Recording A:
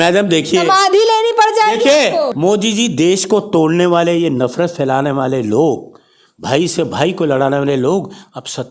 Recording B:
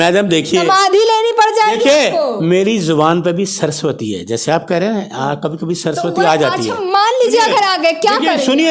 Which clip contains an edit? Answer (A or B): A